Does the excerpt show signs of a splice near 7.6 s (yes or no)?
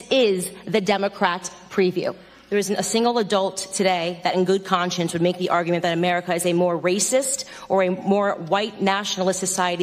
no